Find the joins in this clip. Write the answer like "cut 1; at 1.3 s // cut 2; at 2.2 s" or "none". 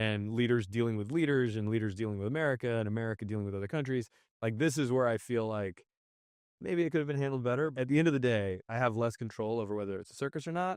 cut 1; at 7.7 s // cut 2; at 8.6 s